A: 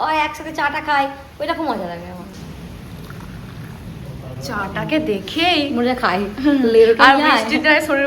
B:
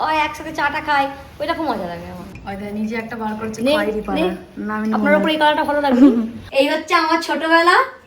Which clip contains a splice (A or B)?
B